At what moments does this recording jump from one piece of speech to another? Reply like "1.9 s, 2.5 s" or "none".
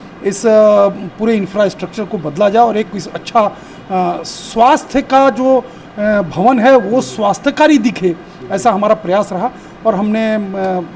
none

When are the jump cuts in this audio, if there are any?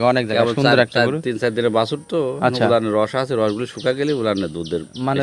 none

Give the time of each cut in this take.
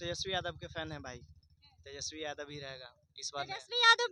none

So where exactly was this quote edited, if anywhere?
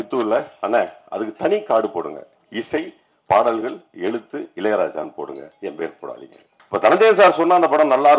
6.5 s

